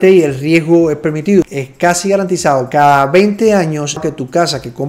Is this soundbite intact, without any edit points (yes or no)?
no